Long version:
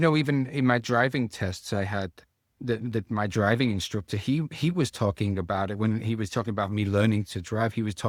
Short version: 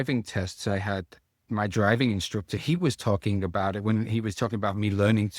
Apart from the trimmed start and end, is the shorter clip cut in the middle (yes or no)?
yes